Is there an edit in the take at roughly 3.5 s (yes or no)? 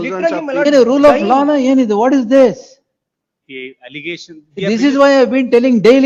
no